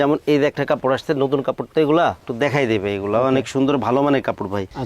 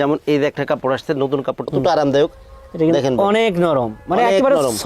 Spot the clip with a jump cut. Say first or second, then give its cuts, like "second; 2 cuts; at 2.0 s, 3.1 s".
second; 1 cut; at 1.7 s